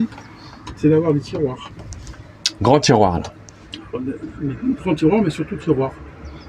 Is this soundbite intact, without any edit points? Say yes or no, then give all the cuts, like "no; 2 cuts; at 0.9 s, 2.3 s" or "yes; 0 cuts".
yes; 0 cuts